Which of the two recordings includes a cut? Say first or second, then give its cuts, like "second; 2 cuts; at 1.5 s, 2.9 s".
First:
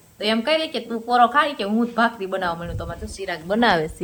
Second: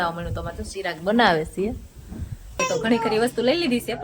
second; 1 cut; at 2.6 s